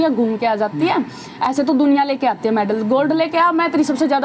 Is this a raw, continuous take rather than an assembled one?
yes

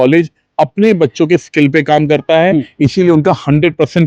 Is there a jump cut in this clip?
no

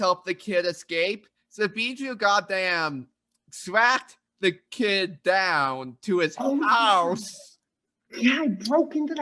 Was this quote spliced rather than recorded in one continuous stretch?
no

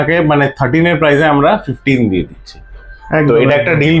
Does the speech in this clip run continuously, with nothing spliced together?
yes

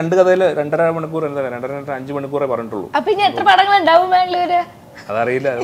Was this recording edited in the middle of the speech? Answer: no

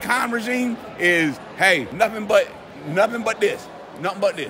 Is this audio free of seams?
no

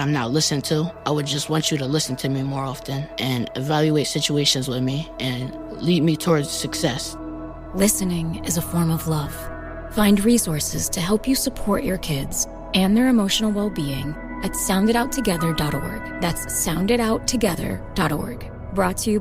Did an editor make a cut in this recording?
no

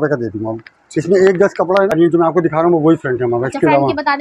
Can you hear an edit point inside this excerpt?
yes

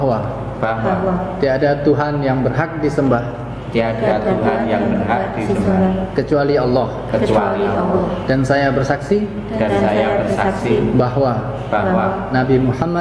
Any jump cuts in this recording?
no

